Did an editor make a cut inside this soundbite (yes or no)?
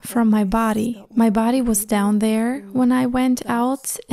yes